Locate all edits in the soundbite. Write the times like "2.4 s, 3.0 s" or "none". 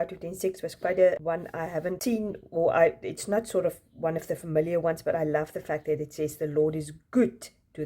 1.8 s